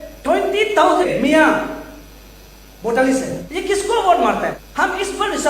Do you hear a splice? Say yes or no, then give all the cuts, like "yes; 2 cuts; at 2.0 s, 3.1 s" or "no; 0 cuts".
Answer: yes; 3 cuts; at 1.1 s, 3.4 s, 4.6 s